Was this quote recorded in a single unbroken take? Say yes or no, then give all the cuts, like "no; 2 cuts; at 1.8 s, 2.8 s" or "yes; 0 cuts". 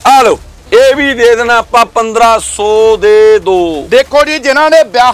yes; 0 cuts